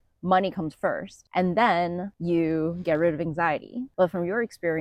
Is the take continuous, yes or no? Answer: no